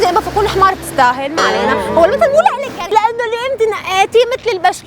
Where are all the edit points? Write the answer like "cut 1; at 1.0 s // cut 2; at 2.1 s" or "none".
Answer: cut 1; at 2.9 s